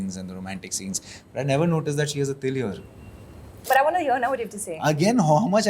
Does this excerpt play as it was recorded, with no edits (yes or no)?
no